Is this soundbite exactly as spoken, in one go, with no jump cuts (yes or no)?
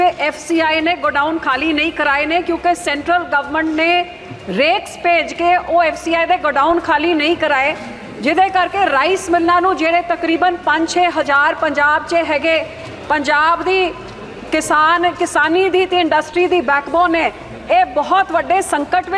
yes